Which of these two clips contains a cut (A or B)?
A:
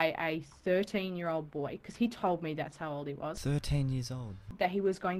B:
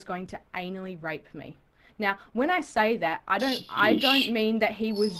A